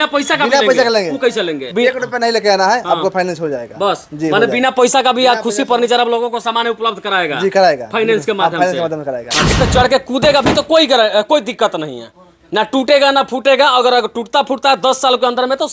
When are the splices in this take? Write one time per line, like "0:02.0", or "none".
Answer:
0:01.6
0:09.4